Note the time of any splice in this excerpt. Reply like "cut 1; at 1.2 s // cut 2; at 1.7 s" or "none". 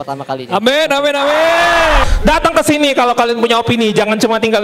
cut 1; at 2.0 s